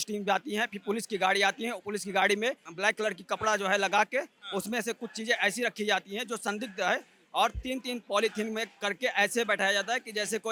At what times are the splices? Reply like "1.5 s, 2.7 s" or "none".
none